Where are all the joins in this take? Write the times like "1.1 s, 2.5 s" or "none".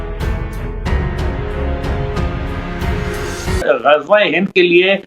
3.6 s

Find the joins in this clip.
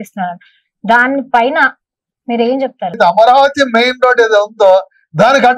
2.9 s

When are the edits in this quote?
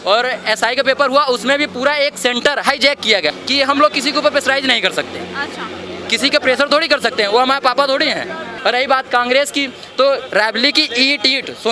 3.3 s, 8.4 s

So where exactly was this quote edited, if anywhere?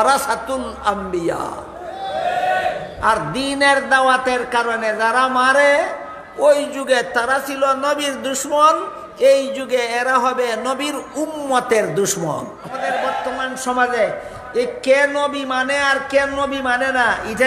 13.2 s

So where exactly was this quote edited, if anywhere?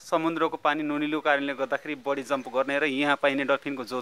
none

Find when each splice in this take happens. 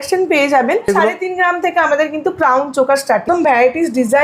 0.9 s, 3.2 s

